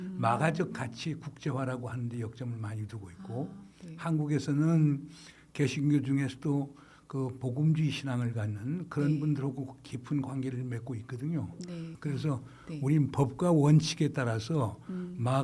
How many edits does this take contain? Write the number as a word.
one